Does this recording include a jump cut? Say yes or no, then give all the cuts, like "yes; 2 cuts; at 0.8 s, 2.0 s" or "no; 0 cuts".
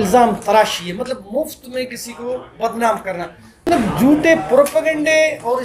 yes; 1 cut; at 3.6 s